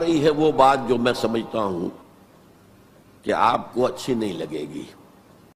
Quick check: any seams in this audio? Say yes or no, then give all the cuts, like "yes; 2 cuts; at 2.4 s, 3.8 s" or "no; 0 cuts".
no; 0 cuts